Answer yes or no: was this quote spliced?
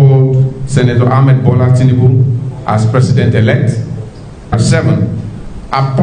yes